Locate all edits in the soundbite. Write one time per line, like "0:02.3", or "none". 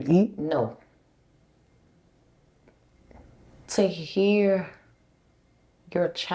0:02.6